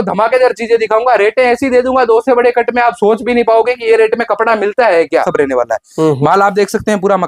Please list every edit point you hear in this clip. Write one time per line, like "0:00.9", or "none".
0:05.3